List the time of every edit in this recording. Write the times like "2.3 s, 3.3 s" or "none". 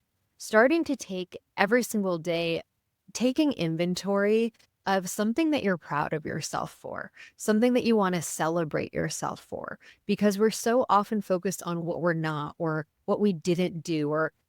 11.8 s